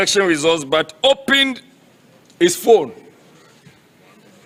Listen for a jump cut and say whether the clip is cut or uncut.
uncut